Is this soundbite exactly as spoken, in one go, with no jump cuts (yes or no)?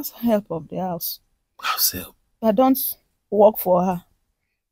no